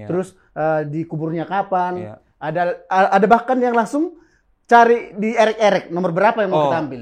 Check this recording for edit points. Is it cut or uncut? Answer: uncut